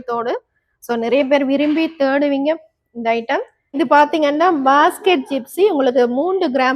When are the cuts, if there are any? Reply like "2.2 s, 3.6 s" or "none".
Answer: 3.8 s